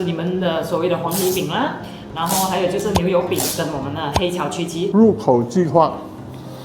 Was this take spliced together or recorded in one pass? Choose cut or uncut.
cut